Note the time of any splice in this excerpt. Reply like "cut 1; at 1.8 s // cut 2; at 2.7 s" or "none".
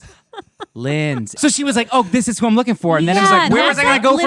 cut 1; at 1.4 s